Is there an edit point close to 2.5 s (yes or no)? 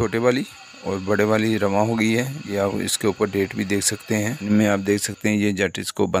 yes